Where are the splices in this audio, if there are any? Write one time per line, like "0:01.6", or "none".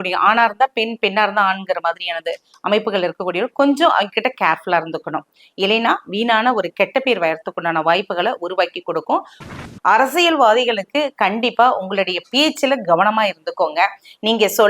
0:09.5